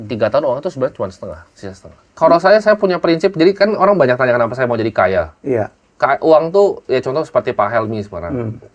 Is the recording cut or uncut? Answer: cut